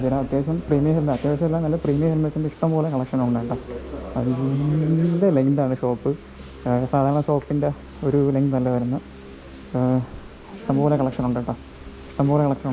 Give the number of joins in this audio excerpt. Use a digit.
0